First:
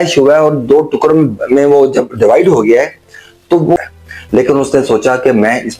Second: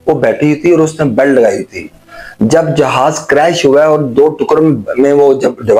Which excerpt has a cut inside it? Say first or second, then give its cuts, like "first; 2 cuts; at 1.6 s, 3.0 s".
first; 1 cut; at 3.8 s